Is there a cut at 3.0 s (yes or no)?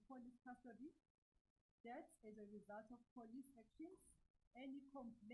no